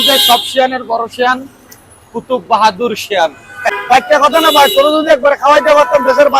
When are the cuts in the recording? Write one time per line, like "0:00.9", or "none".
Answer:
0:03.5

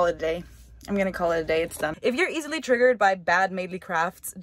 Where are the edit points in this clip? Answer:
0:02.0

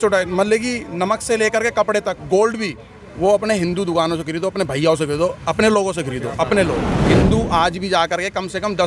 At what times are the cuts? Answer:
0:07.1

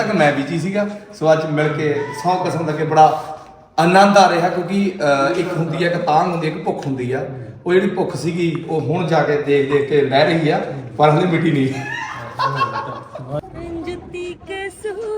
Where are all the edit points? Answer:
0:13.2

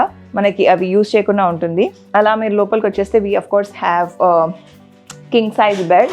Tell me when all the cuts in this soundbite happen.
0:02.0

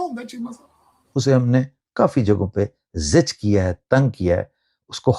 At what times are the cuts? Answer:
0:00.9

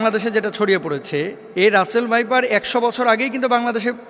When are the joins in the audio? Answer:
0:01.4

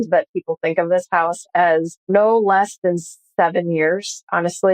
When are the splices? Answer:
0:02.0

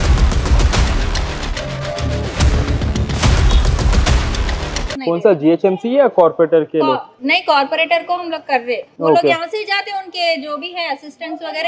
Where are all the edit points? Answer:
0:04.9

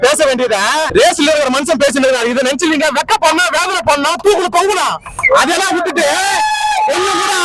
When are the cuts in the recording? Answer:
none

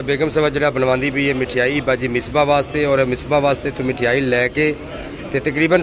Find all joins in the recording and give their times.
none

